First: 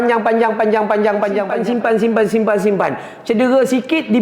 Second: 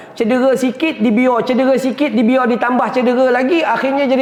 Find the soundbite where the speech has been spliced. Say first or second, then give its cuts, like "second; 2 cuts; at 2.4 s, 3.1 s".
first; 1 cut; at 1.6 s